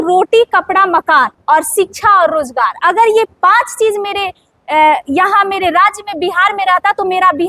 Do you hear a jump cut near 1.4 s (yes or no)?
yes